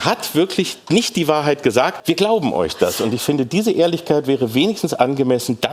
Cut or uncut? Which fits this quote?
cut